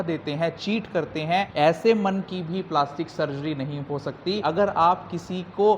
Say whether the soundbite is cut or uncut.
cut